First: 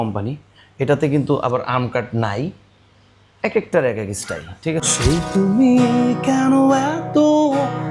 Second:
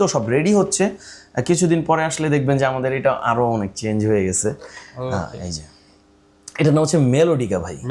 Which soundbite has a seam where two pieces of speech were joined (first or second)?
first